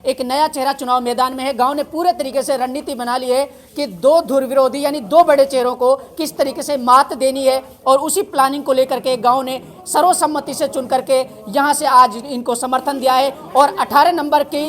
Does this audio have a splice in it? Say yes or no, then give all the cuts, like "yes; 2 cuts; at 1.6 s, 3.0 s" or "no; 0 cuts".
no; 0 cuts